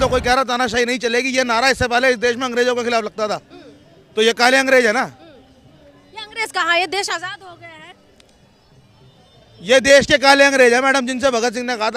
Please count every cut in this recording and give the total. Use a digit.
0